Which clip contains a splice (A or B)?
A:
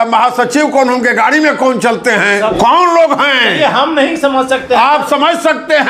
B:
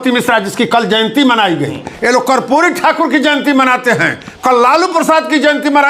A